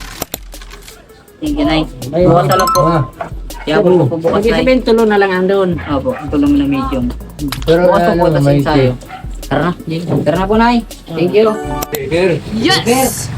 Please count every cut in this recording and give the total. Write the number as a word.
one